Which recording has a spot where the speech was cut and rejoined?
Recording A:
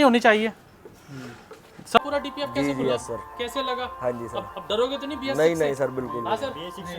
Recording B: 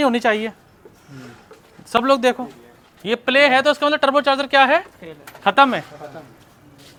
A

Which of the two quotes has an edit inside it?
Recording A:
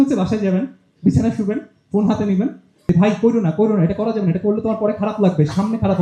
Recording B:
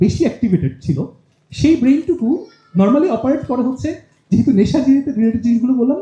A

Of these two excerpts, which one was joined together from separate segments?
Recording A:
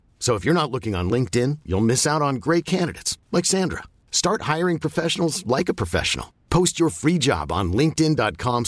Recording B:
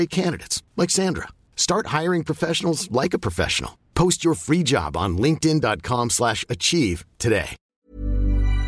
B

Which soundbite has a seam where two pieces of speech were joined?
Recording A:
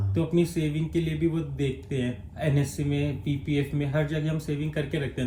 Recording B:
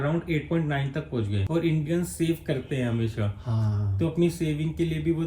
B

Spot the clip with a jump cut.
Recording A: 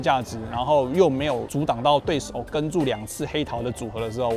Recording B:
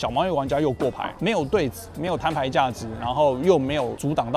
B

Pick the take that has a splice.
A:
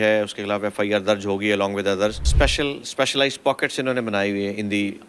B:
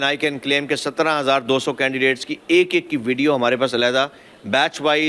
A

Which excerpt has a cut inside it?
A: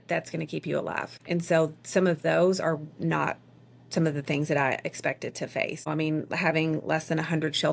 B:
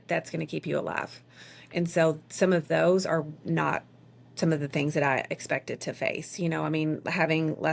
A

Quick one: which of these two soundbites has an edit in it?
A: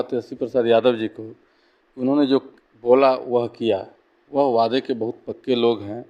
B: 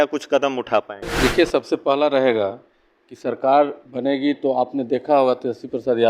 B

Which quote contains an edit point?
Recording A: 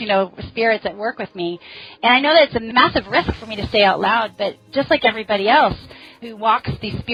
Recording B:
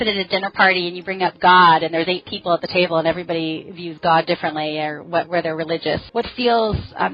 B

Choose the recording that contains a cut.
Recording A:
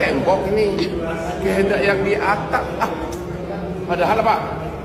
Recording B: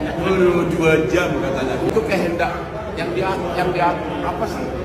B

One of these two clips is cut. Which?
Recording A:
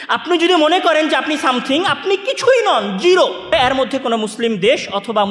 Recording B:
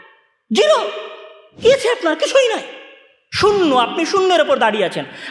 A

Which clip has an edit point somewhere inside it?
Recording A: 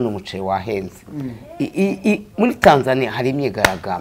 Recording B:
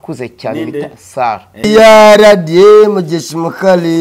B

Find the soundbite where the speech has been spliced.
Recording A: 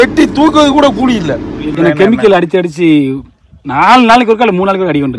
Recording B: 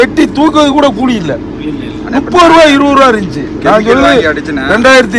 A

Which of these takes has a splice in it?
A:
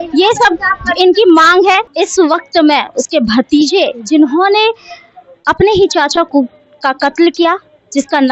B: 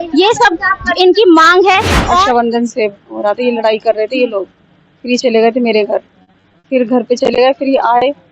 B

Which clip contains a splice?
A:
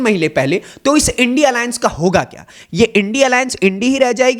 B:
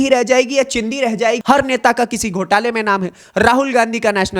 B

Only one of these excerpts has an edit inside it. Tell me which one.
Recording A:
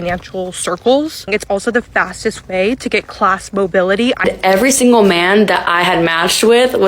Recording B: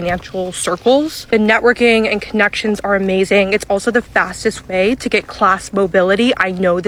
A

